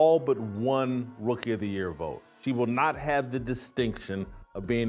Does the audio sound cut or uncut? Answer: uncut